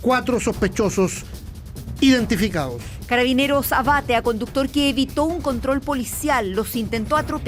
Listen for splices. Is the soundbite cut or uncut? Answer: uncut